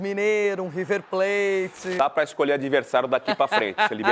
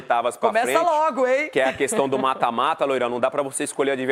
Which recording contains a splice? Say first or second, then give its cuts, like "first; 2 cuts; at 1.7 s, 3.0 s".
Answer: first; 1 cut; at 2.0 s